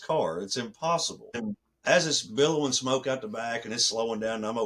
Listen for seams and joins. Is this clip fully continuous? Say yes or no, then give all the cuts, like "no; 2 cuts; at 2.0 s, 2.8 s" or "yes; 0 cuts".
no; 1 cut; at 1.4 s